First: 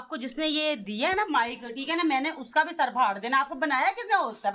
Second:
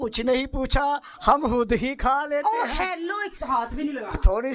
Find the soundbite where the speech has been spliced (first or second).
second